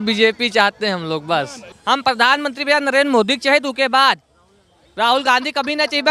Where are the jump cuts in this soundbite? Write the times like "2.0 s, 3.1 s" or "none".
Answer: 1.7 s